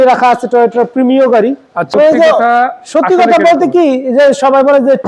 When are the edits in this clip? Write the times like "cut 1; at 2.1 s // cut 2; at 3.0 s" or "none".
cut 1; at 1.7 s